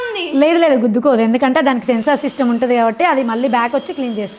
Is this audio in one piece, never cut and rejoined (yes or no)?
yes